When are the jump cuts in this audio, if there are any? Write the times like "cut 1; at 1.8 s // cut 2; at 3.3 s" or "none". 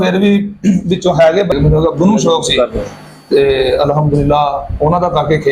cut 1; at 1.5 s